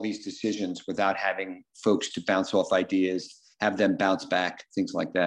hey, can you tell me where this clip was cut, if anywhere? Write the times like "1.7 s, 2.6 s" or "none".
none